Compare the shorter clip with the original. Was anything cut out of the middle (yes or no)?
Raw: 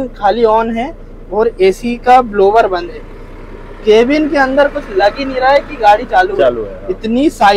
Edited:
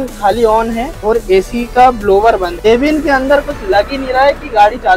yes